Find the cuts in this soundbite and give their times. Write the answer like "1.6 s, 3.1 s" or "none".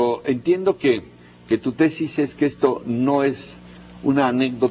1.8 s

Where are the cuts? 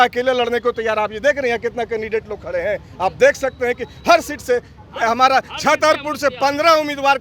none

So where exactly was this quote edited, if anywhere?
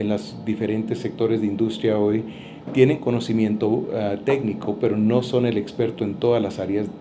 none

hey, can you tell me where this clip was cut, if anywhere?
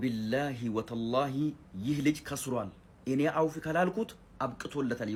none

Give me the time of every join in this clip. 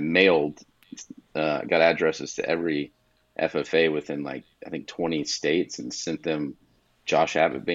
none

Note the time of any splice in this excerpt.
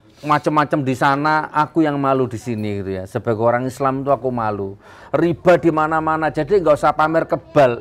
5.0 s

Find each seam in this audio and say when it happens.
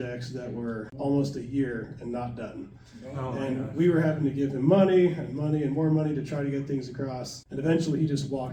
none

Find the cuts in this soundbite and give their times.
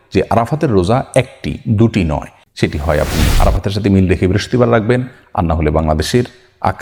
2.4 s

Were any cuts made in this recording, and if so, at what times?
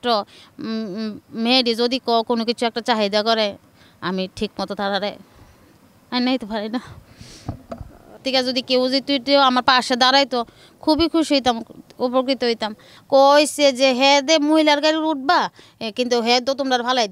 8.2 s, 12.9 s

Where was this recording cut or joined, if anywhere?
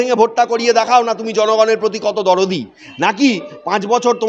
none

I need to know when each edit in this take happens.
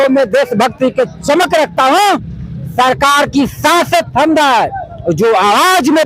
none

